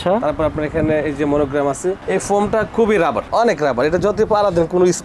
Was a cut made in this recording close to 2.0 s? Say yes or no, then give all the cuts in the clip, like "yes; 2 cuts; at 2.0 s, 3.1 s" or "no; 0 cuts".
yes; 2 cuts; at 2.0 s, 3.3 s